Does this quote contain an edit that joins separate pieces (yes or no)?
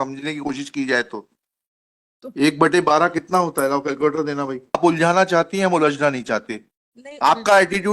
yes